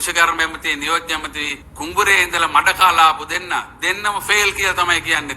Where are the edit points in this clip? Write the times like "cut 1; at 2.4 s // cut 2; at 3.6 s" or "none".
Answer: cut 1; at 1.6 s